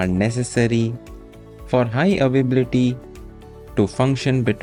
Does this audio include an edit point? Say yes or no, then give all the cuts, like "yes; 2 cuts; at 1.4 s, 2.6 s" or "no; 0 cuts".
no; 0 cuts